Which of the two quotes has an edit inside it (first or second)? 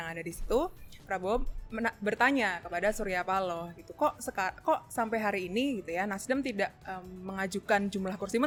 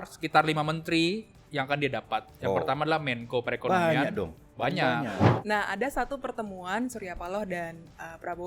second